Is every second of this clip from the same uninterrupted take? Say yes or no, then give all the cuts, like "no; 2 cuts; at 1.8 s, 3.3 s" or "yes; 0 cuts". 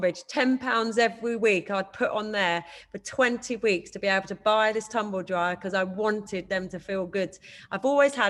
yes; 0 cuts